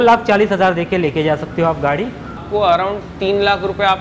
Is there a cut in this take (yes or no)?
yes